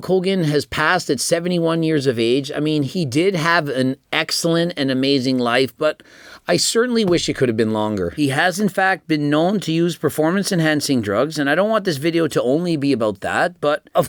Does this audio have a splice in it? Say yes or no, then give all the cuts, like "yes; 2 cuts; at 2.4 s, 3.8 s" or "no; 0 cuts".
no; 0 cuts